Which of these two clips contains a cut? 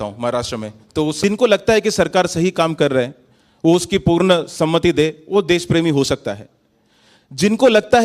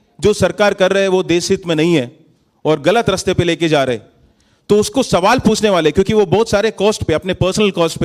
first; 1 cut; at 1.2 s

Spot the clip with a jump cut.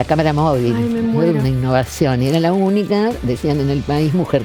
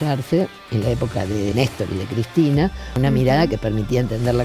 second; 2 cuts; at 1.5 s, 2.9 s

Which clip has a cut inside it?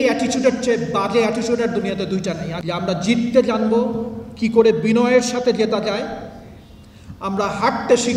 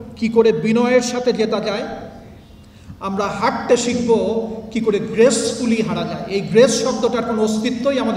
first; 1 cut; at 2.5 s

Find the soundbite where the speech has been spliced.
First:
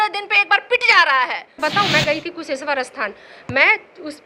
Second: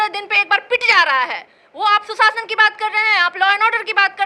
first; 1 cut; at 1.6 s

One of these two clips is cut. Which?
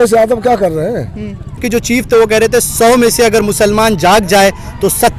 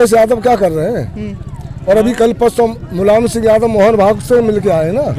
first; 1 cut; at 1.6 s

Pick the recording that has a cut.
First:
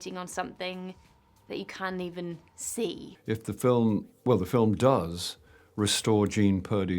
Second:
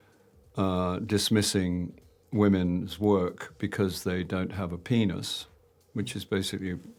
first; 1 cut; at 3.1 s

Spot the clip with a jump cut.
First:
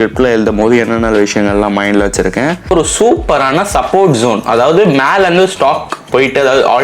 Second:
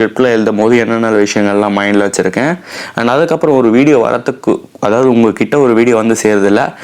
first; 1 cut; at 2.7 s

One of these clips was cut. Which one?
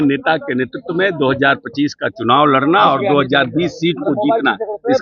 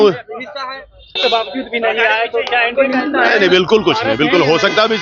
second; 1 cut; at 1.2 s

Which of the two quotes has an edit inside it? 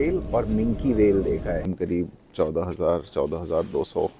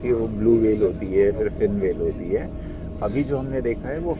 first; 1 cut; at 1.7 s

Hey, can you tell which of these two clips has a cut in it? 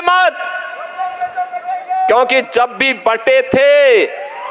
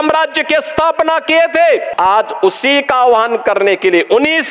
second; 1 cut; at 1.9 s

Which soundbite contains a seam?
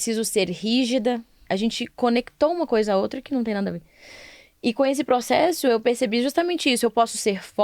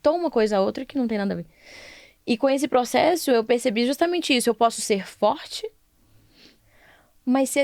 first; 1 cut; at 1.4 s

